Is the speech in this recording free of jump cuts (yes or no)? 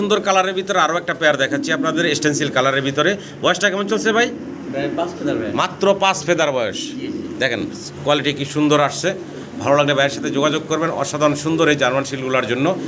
yes